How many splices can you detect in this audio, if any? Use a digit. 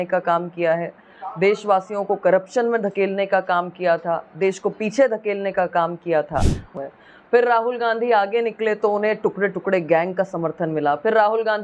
1